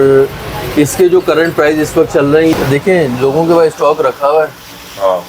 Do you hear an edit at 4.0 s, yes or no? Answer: no